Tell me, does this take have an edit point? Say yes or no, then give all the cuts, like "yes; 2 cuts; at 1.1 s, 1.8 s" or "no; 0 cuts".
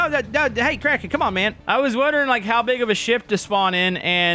yes; 1 cut; at 1.6 s